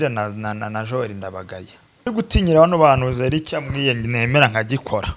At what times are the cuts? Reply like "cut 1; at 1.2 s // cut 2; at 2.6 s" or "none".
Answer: cut 1; at 2.1 s